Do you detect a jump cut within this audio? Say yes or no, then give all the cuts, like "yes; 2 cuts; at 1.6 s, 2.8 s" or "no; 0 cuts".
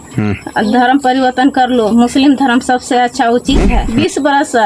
yes; 1 cut; at 3.7 s